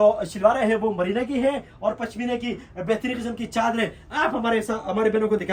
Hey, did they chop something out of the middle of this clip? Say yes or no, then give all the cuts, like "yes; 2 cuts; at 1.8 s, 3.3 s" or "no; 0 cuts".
no; 0 cuts